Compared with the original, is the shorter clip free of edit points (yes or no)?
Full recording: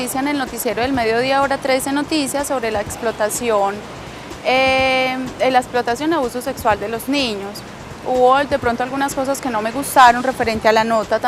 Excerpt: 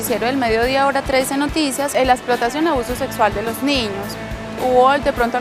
no